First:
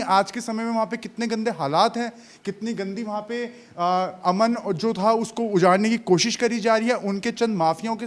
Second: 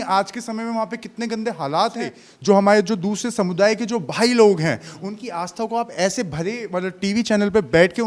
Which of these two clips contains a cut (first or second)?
second